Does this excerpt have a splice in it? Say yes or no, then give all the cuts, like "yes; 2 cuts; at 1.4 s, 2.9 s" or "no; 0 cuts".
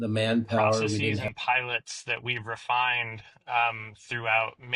yes; 1 cut; at 1.2 s